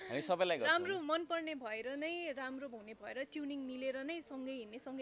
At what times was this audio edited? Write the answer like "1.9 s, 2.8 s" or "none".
none